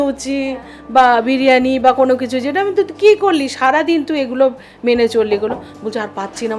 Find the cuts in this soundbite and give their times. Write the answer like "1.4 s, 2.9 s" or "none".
none